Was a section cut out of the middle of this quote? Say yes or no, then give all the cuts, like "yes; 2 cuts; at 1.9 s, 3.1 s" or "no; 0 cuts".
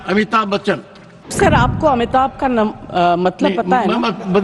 yes; 1 cut; at 1.3 s